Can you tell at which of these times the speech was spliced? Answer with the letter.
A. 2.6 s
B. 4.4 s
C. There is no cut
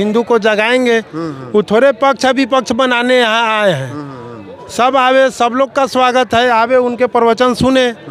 C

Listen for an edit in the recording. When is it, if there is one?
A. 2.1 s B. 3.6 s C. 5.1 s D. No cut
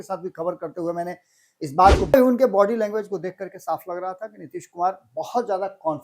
A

